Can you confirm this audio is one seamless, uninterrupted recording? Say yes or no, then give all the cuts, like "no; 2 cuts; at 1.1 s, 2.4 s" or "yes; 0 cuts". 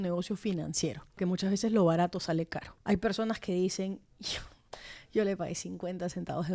no; 2 cuts; at 1.2 s, 2.7 s